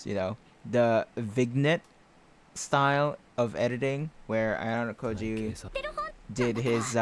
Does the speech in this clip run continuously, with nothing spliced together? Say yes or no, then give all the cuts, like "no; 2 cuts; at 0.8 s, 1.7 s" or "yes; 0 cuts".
yes; 0 cuts